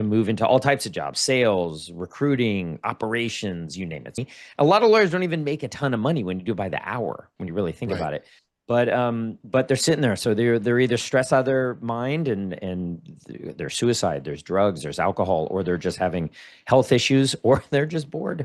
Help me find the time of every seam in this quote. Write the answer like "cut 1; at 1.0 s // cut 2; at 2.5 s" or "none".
cut 1; at 4.2 s